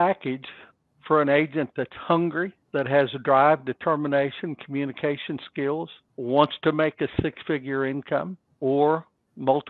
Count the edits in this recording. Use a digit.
3